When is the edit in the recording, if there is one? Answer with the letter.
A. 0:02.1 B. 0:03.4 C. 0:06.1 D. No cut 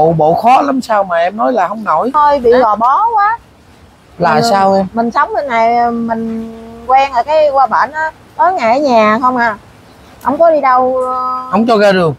A